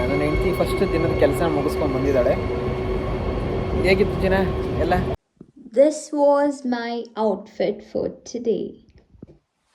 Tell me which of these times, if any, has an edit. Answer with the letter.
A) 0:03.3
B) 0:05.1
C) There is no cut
B